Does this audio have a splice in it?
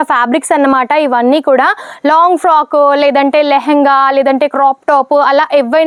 no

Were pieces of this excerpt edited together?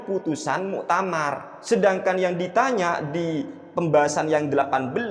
yes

